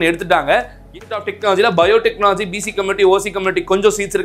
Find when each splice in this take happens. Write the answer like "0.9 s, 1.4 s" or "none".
0.9 s